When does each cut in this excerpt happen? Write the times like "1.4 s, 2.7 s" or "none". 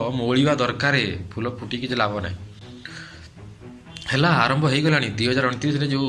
none